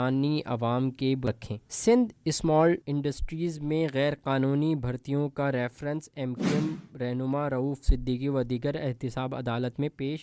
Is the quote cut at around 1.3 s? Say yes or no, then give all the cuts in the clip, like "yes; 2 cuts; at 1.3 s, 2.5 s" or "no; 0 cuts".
yes; 1 cut; at 1.3 s